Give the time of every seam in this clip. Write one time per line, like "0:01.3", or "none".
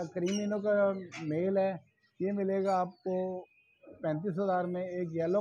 none